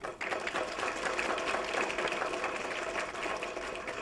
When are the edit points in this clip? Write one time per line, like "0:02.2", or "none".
none